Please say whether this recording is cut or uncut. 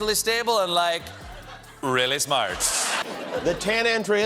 cut